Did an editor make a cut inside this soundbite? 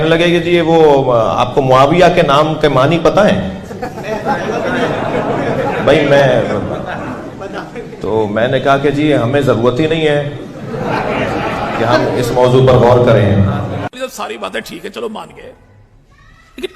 no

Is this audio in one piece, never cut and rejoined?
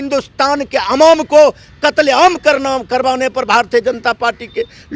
yes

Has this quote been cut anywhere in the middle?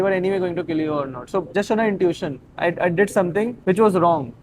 yes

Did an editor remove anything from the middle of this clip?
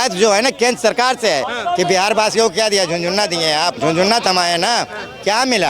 yes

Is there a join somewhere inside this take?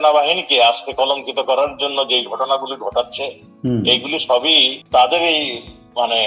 no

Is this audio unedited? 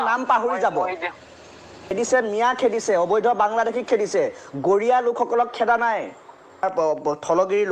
no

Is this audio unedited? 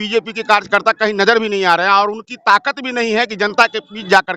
yes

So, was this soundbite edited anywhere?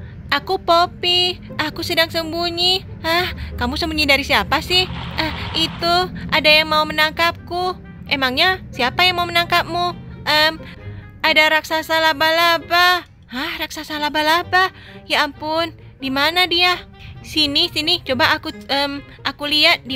no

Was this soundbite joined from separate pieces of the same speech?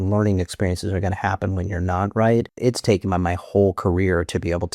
yes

